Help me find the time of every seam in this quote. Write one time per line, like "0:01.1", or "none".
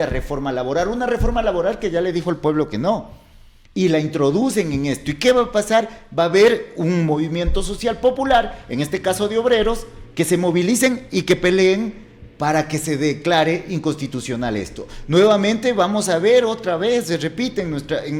none